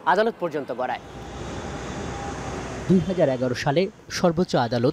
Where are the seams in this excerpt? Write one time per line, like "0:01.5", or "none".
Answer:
none